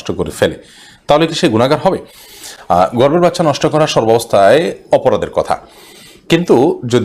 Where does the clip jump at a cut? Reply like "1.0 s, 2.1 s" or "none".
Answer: none